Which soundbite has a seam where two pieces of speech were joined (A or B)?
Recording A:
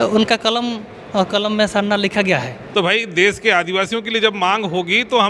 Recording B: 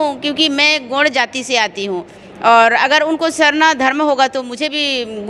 A